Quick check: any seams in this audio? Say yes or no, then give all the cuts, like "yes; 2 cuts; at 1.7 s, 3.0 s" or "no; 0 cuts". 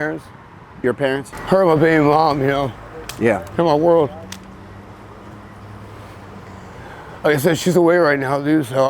yes; 1 cut; at 1.3 s